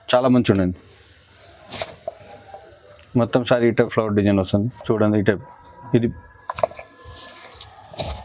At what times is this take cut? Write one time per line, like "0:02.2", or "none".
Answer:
0:04.8